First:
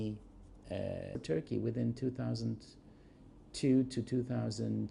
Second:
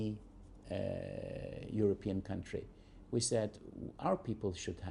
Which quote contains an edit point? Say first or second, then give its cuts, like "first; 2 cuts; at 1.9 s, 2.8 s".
second; 1 cut; at 1.1 s